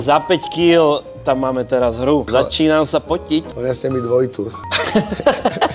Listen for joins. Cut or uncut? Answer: cut